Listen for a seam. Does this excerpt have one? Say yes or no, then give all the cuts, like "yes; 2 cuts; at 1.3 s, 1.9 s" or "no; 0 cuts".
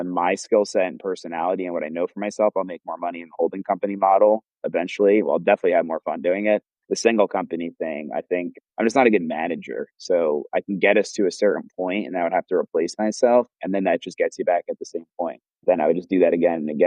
no; 0 cuts